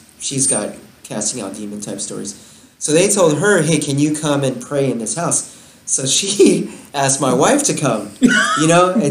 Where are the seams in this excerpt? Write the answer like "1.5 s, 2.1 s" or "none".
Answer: none